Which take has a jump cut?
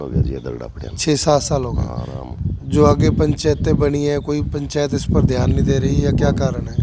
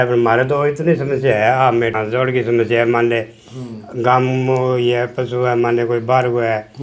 second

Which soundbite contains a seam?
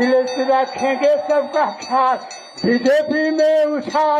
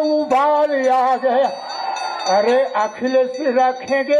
second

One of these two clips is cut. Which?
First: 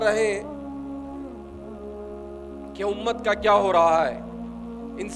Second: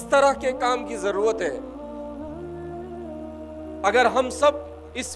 second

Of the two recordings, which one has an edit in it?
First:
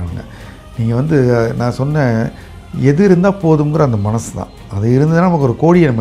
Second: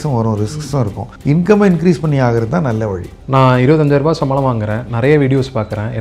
second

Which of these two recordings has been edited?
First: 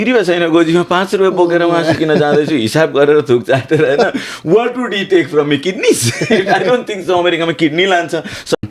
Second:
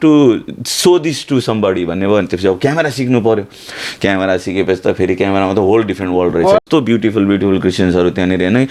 second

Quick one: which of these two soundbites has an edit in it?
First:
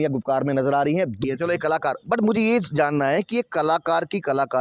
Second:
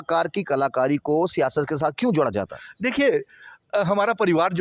first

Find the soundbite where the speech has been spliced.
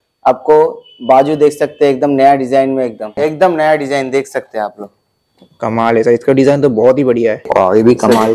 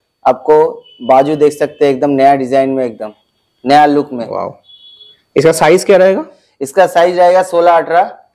first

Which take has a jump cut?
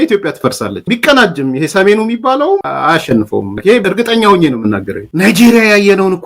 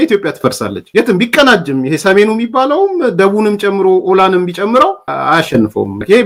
first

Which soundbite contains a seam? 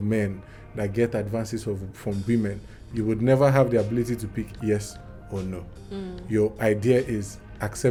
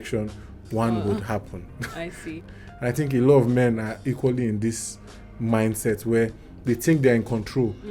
second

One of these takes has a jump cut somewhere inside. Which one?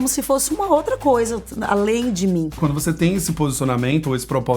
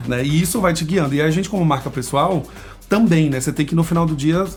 first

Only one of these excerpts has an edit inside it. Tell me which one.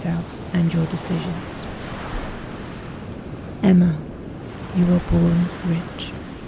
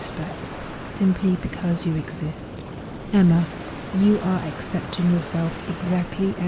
first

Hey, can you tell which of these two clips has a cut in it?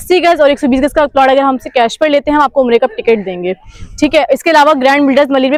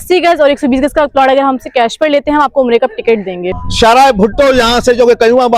second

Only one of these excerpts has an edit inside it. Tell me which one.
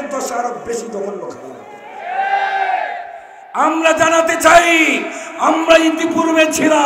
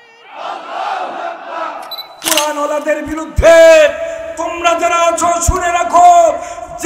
second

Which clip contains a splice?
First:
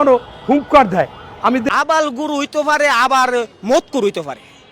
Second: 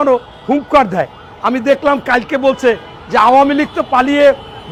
first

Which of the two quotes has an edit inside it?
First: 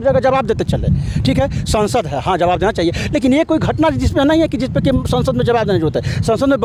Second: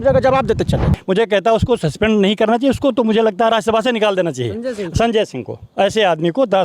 second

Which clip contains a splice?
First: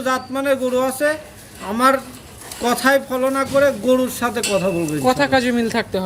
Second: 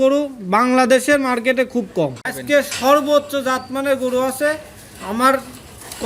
second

